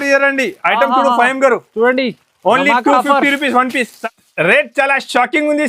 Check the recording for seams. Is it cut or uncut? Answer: cut